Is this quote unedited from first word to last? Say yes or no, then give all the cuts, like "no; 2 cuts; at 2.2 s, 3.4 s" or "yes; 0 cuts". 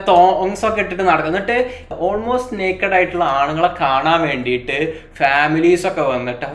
no; 1 cut; at 1.8 s